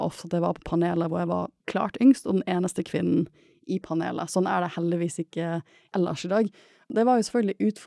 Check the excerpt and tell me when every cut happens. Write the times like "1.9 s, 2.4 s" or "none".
1.6 s, 5.7 s, 6.9 s